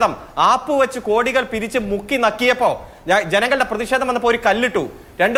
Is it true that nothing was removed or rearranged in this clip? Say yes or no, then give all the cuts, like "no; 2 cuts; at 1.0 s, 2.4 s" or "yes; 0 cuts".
yes; 0 cuts